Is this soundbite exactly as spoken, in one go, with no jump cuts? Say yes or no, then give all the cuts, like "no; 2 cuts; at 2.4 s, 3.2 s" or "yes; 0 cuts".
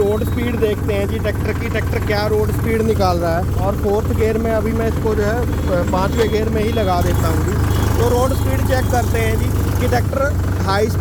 yes; 0 cuts